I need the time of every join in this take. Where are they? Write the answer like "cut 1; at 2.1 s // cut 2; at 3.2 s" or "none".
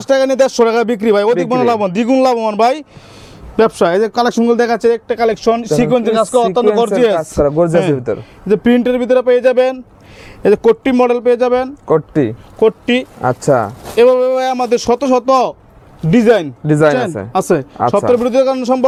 none